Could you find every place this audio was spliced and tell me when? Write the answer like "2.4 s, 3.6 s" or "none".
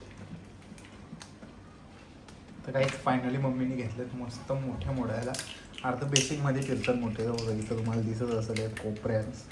none